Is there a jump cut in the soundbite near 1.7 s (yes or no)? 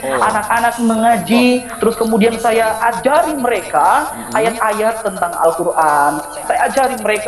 yes